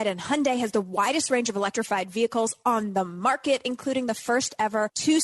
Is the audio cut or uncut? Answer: uncut